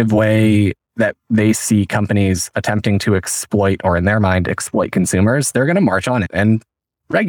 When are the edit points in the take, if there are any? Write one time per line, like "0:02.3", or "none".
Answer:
none